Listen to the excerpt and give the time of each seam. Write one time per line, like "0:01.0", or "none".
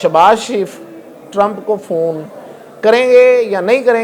none